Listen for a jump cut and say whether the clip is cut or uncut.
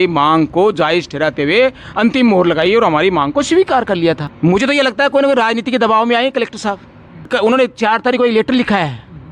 cut